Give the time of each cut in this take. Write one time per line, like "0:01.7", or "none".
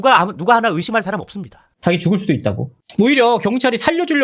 0:01.7